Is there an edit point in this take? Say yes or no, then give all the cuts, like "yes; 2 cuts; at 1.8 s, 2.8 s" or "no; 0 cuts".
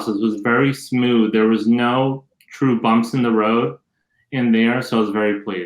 no; 0 cuts